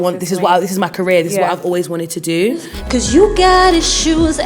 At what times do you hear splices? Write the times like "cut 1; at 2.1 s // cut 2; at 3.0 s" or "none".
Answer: cut 1; at 2.7 s